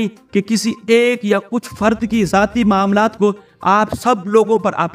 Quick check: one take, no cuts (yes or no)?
yes